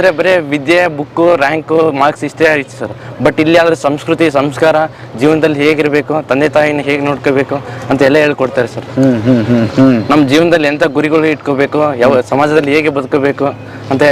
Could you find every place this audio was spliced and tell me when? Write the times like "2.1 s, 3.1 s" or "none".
none